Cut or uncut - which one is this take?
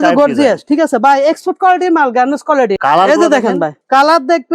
cut